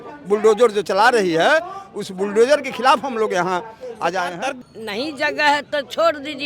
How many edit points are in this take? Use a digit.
1